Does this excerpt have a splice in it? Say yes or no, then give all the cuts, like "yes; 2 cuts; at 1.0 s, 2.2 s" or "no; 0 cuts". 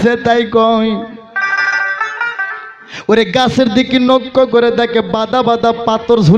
no; 0 cuts